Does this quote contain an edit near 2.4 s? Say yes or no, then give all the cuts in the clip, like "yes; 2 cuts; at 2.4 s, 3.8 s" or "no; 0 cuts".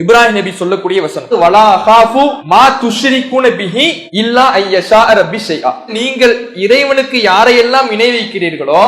yes; 3 cuts; at 1.3 s, 2.4 s, 4.0 s